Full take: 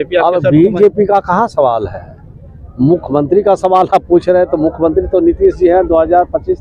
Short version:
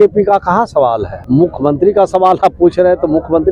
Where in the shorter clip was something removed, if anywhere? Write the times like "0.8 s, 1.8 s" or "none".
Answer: 1.1 s